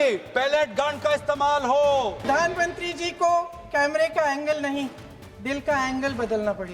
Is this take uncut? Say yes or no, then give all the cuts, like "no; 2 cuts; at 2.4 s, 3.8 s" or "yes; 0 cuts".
no; 1 cut; at 2.2 s